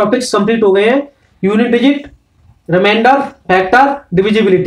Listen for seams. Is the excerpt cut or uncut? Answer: uncut